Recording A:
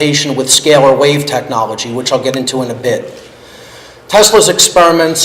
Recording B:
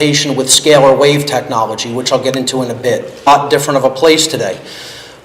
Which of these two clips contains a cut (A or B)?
A